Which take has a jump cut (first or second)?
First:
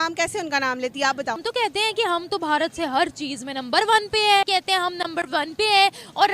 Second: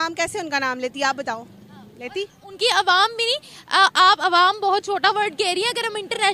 first